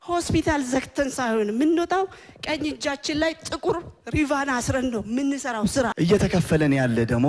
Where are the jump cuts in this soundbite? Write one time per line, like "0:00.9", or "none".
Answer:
0:05.9